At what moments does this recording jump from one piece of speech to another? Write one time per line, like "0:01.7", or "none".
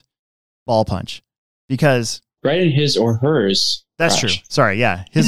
0:02.3